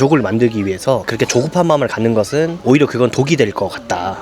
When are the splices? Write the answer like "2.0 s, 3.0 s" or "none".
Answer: 1.1 s, 2.6 s